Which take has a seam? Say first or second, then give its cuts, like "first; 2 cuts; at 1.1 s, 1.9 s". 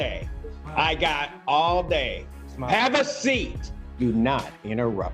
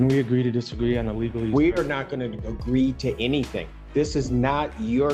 first; 1 cut; at 3.9 s